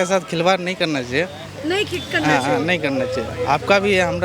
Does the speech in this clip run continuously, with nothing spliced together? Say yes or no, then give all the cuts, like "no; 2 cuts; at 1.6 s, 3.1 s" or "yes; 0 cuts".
yes; 0 cuts